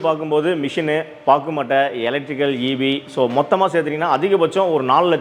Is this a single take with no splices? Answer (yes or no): yes